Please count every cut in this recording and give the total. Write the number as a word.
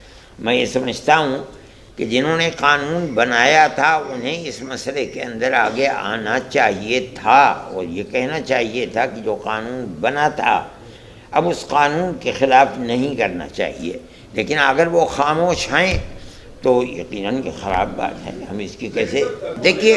zero